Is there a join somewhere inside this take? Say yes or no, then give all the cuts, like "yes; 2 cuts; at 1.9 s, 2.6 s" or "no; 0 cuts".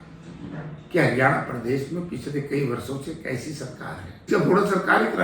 yes; 1 cut; at 4.3 s